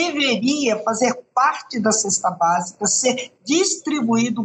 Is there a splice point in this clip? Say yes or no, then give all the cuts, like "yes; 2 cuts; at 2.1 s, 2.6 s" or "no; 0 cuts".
no; 0 cuts